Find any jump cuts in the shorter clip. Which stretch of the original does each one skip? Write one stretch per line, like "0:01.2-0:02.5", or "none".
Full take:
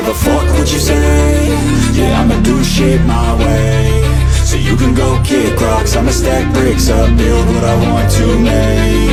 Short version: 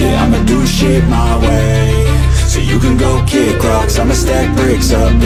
none